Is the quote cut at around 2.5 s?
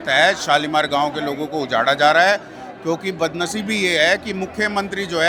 no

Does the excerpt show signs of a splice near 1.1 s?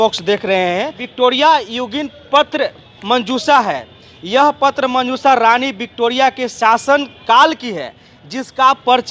yes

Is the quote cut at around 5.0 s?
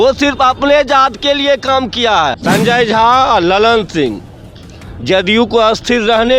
no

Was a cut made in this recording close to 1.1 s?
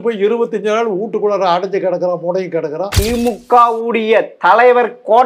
no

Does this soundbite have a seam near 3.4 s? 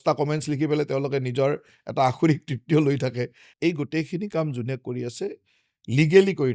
yes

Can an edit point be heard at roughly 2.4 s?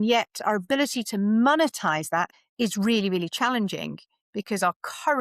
yes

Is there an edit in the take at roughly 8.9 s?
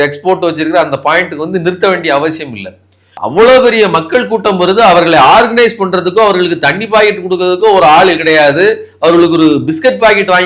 no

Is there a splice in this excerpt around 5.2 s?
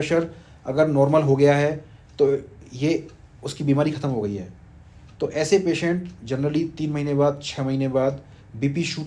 no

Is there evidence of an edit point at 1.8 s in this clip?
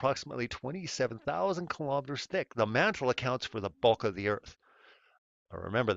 yes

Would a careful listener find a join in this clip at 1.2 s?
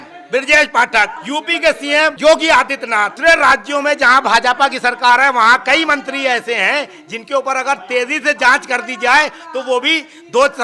yes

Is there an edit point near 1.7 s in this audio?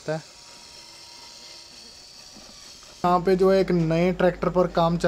no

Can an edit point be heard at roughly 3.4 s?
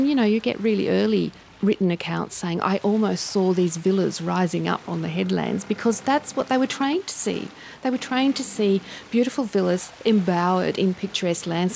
no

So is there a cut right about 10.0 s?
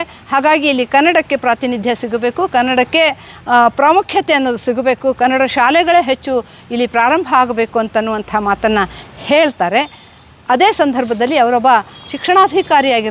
no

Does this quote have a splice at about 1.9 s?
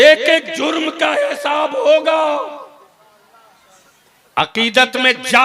no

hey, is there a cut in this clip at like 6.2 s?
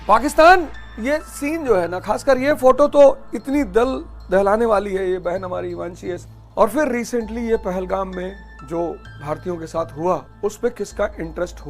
yes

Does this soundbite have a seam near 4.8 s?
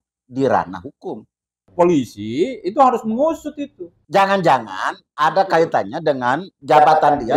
no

